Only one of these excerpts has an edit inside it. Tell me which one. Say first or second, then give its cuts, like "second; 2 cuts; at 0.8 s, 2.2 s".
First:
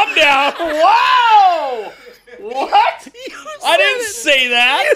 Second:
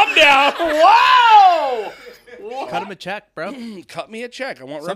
second; 1 cut; at 2.5 s